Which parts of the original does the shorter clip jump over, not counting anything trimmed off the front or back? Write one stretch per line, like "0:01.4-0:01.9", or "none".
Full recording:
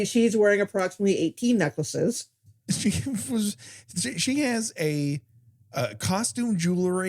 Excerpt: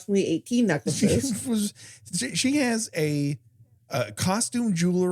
0:01.9-0:02.8